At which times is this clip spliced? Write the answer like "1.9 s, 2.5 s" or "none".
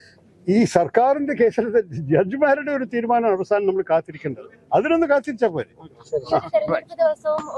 none